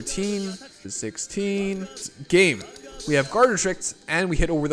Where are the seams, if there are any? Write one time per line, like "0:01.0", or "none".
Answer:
0:00.9
0:02.1